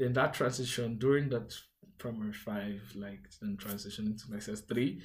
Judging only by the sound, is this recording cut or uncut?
uncut